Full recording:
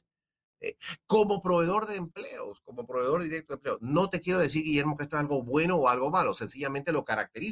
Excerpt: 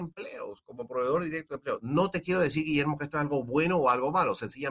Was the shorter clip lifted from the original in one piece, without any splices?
yes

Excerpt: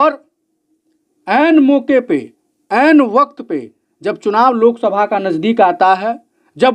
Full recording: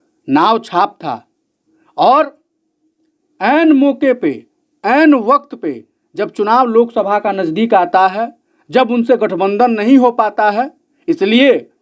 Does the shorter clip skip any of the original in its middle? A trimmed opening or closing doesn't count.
no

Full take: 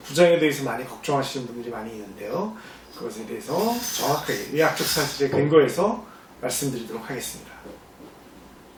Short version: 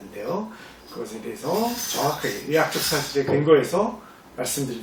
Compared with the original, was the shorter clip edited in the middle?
no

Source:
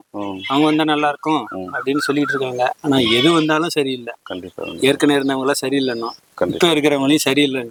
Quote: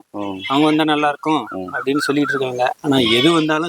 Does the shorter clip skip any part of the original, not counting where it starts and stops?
no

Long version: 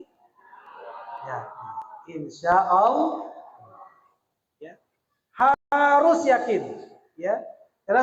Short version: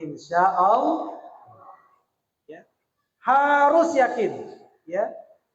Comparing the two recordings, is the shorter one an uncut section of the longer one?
no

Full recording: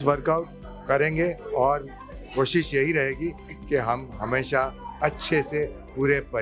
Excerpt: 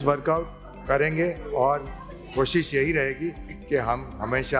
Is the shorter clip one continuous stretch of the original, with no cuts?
yes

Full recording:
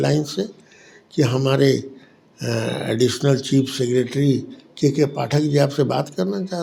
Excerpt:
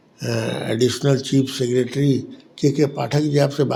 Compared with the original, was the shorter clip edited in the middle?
no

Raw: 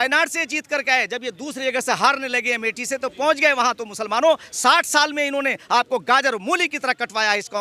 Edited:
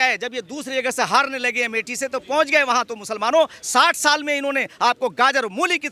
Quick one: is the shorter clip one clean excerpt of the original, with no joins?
yes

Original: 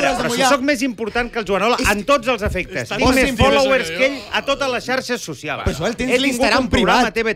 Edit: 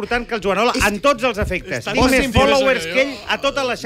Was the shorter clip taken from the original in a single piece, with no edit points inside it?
yes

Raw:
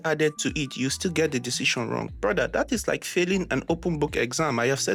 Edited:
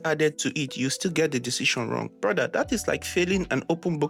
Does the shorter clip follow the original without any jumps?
yes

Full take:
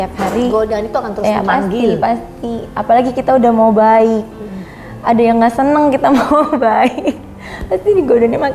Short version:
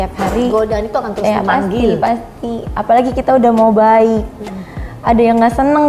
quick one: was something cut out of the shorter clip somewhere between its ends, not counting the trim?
no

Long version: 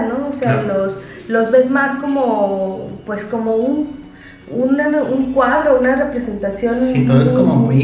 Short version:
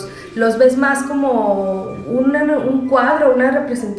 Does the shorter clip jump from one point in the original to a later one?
yes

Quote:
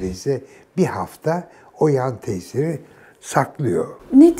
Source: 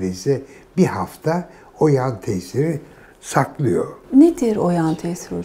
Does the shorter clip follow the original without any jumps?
yes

